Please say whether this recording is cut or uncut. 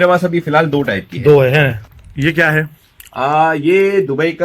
cut